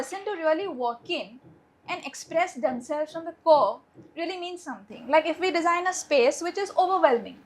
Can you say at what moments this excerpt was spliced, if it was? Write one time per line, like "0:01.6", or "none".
none